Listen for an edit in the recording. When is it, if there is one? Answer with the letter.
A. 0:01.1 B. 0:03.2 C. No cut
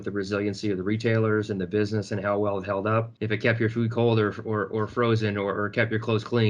B